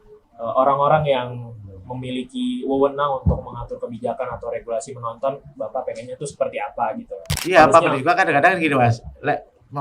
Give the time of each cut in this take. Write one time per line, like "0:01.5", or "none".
0:07.3